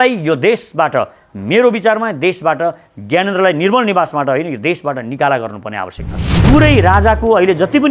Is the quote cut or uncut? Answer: cut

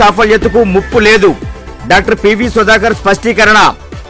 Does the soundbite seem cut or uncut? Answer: uncut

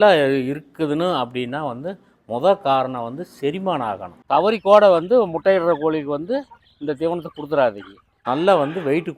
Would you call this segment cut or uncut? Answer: cut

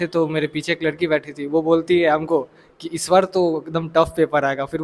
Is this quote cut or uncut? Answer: uncut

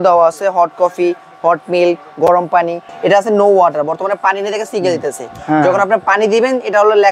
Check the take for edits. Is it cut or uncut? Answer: cut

